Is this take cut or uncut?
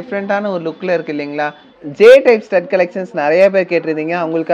cut